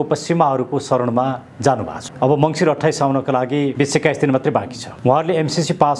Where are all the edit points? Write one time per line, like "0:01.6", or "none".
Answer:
0:02.0
0:03.7
0:04.8